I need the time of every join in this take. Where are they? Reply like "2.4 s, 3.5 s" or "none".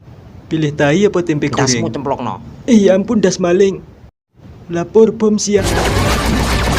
5.6 s